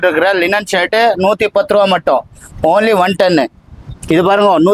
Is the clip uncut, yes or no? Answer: yes